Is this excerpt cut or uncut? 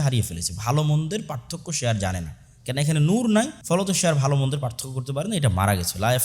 cut